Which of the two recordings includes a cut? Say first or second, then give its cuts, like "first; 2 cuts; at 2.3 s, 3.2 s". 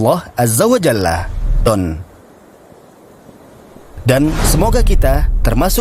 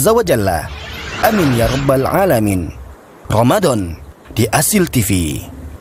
first; 1 cut; at 1.7 s